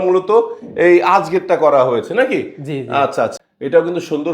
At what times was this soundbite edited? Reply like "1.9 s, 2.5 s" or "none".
3.4 s